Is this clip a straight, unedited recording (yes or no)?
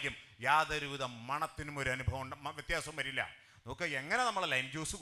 yes